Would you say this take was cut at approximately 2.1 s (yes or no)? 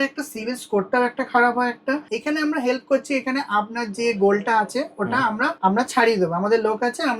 yes